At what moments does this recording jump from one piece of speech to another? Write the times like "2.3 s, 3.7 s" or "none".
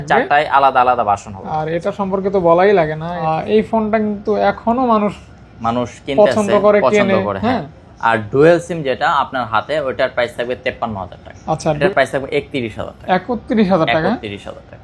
3.2 s, 11.8 s